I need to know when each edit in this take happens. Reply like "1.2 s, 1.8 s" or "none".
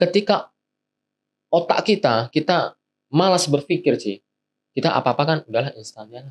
none